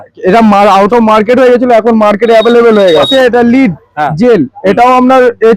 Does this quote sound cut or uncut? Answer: cut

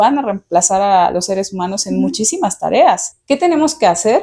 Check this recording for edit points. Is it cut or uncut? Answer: cut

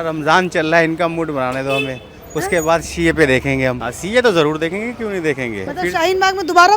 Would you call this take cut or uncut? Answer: cut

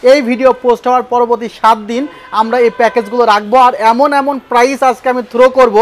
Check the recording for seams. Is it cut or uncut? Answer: uncut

